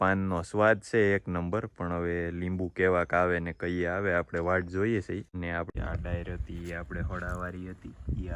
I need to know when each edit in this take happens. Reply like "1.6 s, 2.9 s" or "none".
5.7 s